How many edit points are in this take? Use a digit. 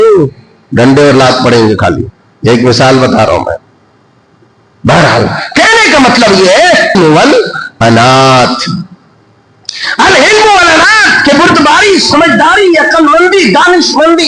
1